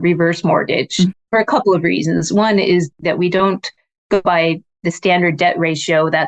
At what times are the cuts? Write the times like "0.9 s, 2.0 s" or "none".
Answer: 1.1 s, 2.9 s, 4.2 s